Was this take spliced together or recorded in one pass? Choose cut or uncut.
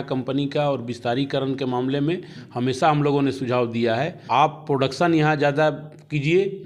cut